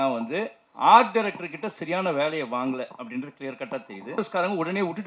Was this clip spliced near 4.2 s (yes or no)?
yes